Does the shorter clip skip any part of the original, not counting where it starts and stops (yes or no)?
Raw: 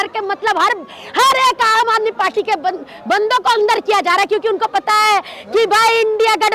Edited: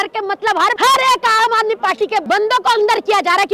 yes